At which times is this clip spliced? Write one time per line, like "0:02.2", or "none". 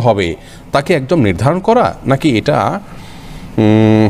none